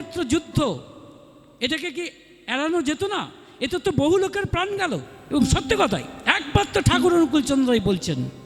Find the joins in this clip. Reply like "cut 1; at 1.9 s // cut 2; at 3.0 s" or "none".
cut 1; at 5.1 s